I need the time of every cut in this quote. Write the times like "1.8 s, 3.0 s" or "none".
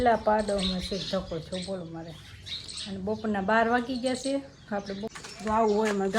5.1 s